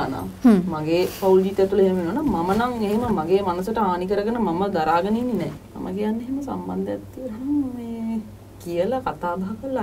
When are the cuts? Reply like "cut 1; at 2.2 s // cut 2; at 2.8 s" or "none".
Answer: cut 1; at 5.7 s